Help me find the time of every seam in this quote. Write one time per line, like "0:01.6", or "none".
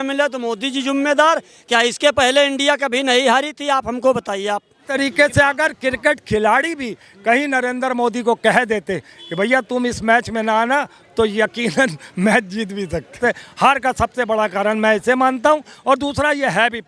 0:05.0
0:13.2